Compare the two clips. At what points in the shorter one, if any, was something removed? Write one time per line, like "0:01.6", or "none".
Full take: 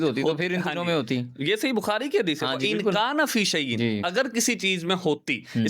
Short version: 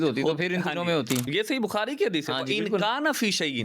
0:01.3